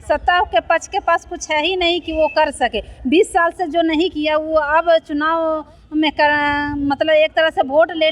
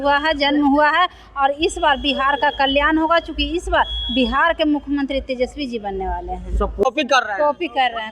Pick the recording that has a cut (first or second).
second